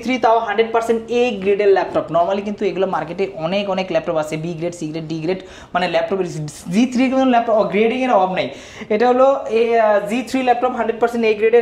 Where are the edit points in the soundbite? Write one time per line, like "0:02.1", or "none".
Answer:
none